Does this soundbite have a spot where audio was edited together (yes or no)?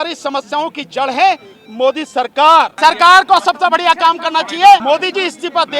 yes